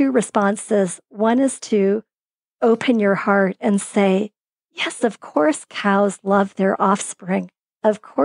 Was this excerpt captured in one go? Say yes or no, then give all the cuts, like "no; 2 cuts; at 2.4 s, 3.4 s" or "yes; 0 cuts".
yes; 0 cuts